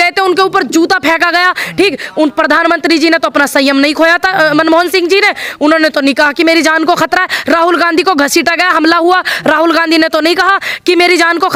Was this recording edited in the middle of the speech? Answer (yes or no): no